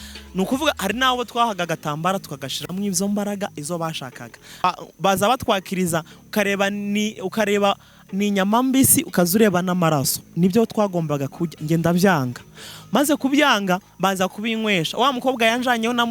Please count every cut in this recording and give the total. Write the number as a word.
one